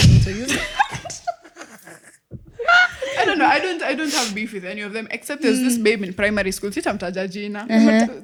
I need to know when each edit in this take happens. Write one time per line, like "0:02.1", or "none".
none